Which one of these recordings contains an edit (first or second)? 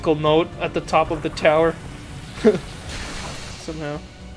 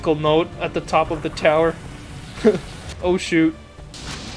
second